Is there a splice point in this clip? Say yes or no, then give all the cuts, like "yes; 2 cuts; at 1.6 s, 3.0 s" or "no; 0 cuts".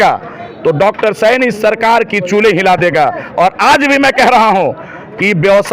no; 0 cuts